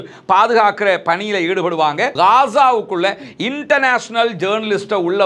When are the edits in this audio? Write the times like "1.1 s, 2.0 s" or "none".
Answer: 2.1 s